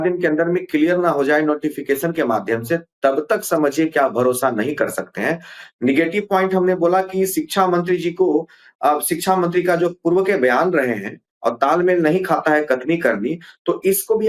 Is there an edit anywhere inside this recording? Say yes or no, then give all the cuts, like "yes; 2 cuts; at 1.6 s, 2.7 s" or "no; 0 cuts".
no; 0 cuts